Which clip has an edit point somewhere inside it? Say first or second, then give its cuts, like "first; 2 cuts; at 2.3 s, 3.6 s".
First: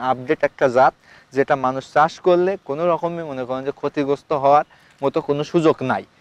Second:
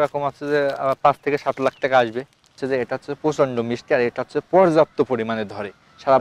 second; 1 cut; at 2.6 s